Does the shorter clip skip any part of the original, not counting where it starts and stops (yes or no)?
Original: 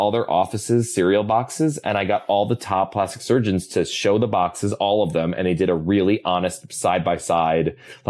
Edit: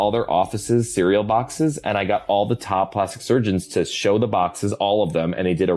no